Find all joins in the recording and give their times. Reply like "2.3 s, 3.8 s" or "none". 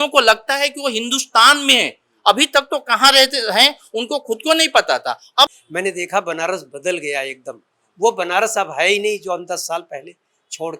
5.6 s

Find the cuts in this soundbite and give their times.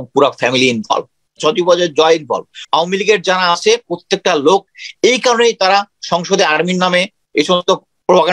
1.4 s, 2.5 s

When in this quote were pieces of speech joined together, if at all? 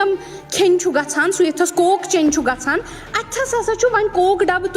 none

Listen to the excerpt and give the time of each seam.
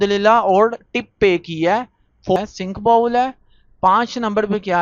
2.4 s

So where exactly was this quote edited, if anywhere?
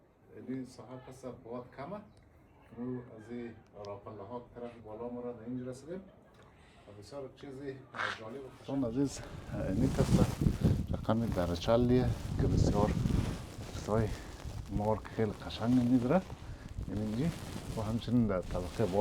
8.8 s

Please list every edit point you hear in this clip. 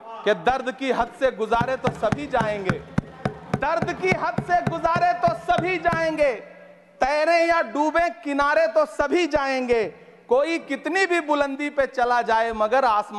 none

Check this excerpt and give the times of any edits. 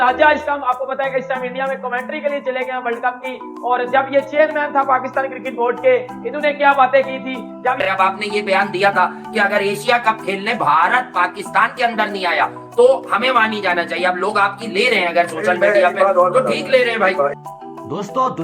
7.8 s, 17.4 s

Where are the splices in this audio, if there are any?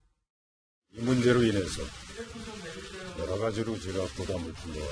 none

